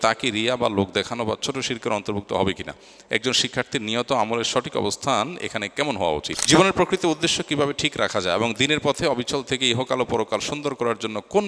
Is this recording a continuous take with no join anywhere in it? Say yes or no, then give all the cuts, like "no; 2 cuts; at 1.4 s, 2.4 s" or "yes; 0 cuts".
no; 1 cut; at 6.3 s